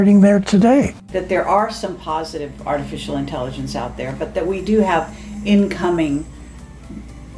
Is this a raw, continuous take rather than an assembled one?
no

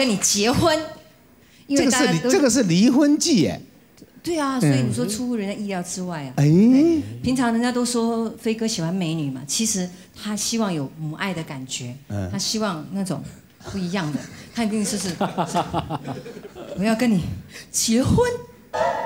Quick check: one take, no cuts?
yes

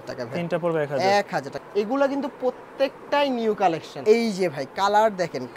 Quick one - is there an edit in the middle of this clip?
yes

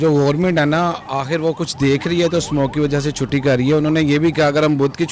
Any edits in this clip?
no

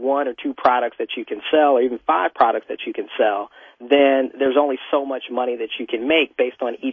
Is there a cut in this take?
no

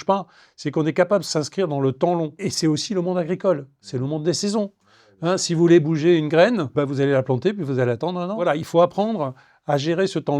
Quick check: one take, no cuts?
no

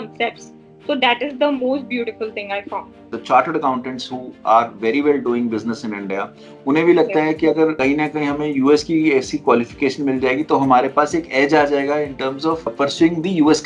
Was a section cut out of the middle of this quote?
yes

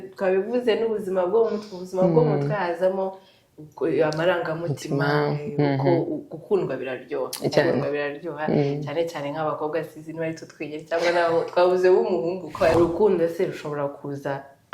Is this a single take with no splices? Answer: no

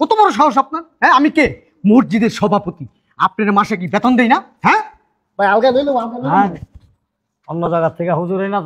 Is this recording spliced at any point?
no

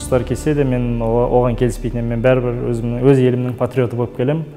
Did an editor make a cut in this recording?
no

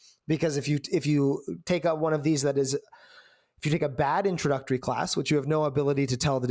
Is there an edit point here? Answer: no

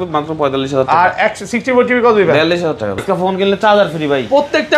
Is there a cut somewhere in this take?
yes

